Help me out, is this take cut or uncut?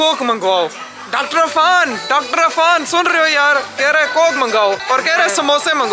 cut